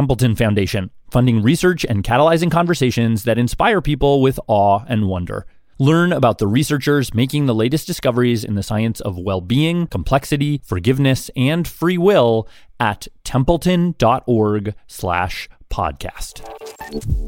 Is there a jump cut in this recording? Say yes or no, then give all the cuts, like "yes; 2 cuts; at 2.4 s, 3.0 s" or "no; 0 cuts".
no; 0 cuts